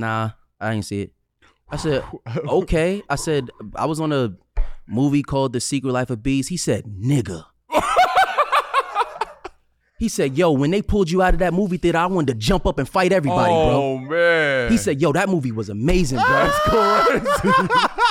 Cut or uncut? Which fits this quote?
uncut